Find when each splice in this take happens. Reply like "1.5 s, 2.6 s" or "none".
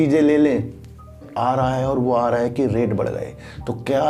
1.3 s